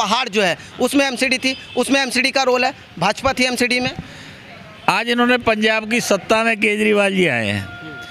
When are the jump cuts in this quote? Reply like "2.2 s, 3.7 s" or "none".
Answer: none